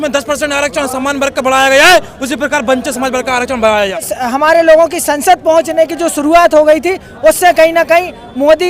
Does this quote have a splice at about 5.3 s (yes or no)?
no